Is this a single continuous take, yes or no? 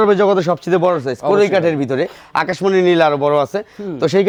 yes